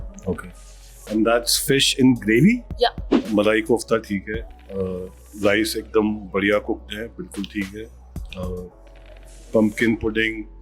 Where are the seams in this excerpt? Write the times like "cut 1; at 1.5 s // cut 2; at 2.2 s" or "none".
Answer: cut 1; at 3.1 s

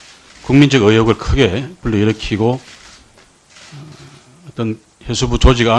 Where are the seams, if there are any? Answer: cut 1; at 3.7 s

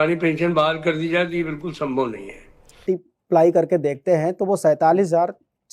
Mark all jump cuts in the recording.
cut 1; at 2.8 s

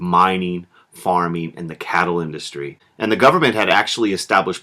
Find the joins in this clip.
cut 1; at 0.9 s

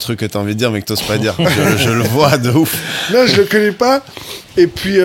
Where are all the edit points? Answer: none

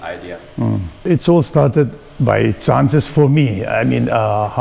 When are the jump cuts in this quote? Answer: cut 1; at 0.9 s

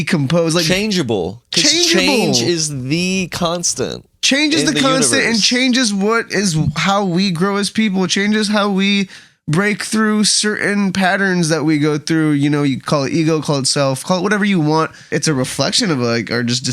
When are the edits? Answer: cut 1; at 15.1 s

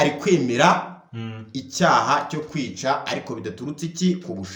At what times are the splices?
none

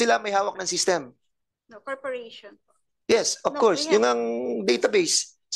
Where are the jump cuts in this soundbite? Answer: none

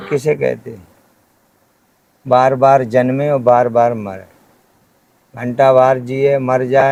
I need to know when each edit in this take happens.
none

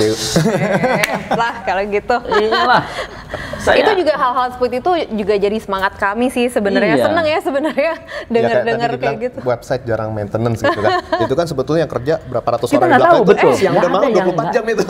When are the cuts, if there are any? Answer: none

